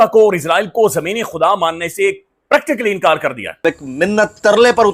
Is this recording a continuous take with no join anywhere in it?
no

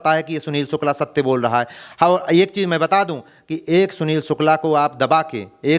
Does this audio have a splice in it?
no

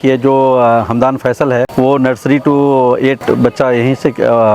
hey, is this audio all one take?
no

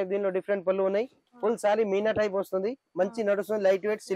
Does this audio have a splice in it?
yes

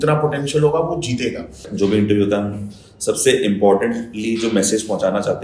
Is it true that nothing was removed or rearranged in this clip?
no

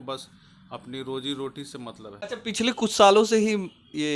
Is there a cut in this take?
yes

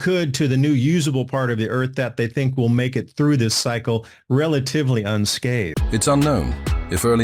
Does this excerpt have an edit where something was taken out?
yes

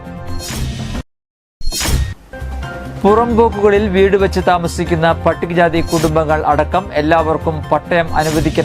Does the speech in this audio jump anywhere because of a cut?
no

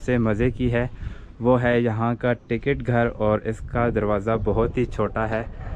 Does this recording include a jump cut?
no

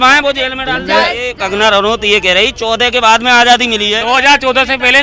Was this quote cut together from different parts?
yes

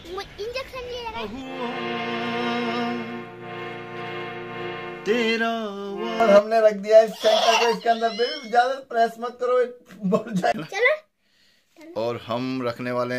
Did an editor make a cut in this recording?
yes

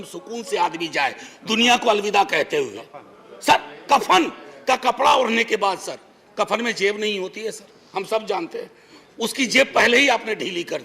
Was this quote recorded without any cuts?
yes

